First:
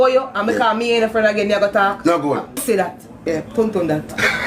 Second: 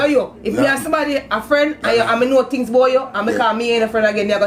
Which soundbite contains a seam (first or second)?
first